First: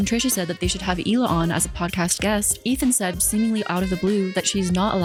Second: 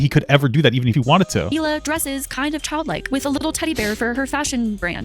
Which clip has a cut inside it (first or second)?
second